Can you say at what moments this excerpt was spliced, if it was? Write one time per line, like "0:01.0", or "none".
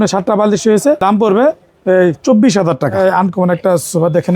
0:01.0
0:03.0